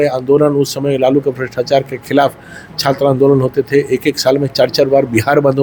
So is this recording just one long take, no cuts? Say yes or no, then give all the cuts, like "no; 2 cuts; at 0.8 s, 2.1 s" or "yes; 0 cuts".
yes; 0 cuts